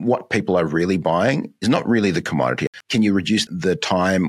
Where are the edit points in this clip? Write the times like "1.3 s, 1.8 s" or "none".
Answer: 2.6 s